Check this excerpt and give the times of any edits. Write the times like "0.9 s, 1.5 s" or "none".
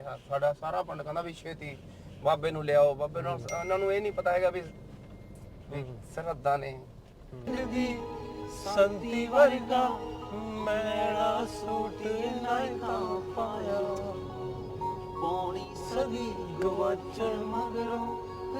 7.5 s